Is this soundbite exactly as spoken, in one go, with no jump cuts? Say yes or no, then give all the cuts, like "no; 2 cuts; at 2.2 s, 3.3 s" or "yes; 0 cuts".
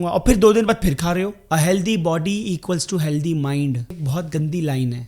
no; 2 cuts; at 1.4 s, 4.0 s